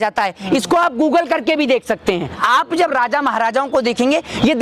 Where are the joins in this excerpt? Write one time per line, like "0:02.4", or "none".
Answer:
0:02.3